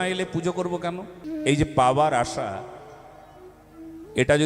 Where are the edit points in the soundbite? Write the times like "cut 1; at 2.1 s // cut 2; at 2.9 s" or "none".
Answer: cut 1; at 1.1 s

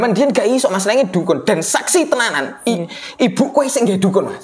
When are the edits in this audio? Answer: none

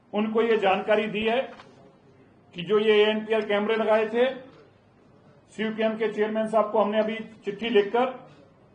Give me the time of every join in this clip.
none

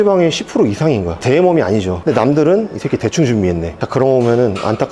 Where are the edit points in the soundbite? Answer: cut 1; at 1.1 s // cut 2; at 3.7 s

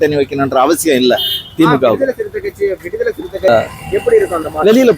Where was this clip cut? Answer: cut 1; at 3.5 s

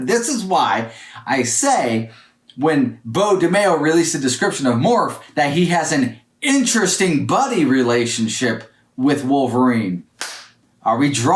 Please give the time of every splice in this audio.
none

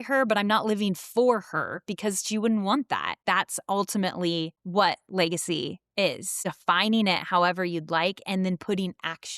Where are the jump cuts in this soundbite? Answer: cut 1; at 3.2 s // cut 2; at 4.6 s // cut 3; at 6.4 s

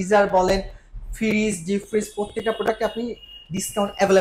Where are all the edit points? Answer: none

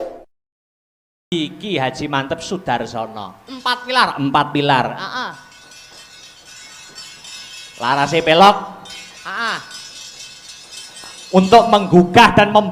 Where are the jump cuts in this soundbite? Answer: cut 1; at 1.1 s

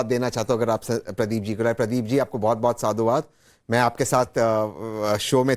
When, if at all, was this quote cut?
cut 1; at 2.9 s

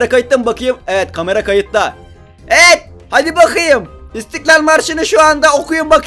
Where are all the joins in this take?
none

